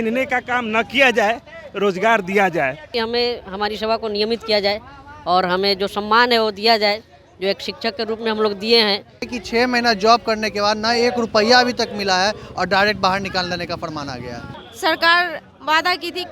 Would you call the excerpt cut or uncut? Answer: cut